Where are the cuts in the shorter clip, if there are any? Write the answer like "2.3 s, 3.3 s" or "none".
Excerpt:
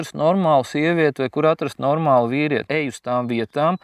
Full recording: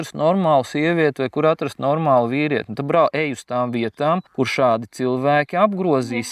2.7 s